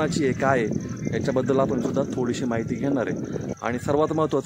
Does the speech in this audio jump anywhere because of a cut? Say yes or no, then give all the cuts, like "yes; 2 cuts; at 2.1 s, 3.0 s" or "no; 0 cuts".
no; 0 cuts